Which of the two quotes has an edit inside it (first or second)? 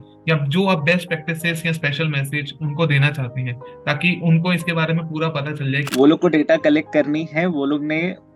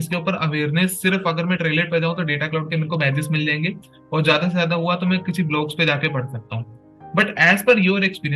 first